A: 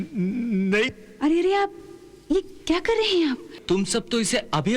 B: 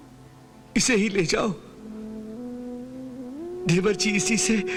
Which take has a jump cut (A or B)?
A